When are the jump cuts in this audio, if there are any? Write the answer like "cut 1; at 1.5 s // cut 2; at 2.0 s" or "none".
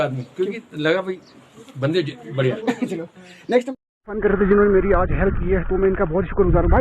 cut 1; at 4.2 s